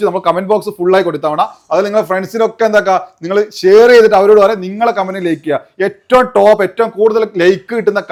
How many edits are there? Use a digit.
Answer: 0